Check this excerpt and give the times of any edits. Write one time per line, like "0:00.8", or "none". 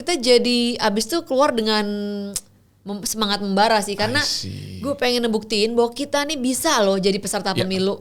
none